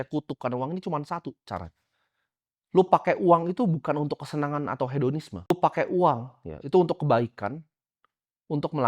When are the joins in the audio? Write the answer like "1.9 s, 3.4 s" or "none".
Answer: 5.5 s